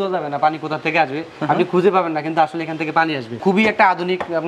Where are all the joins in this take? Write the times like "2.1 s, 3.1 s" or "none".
3.4 s